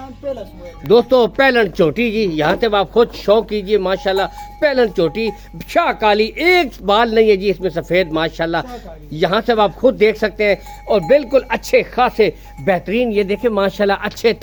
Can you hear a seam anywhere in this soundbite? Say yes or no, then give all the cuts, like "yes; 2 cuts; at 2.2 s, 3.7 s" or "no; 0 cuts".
no; 0 cuts